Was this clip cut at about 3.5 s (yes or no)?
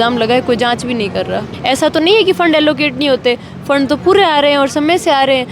no